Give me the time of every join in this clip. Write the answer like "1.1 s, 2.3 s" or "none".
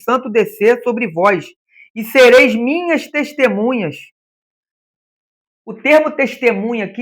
4.8 s